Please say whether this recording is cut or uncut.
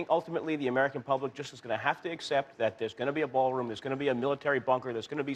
uncut